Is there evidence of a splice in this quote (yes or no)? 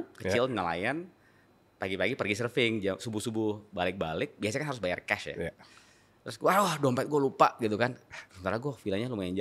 no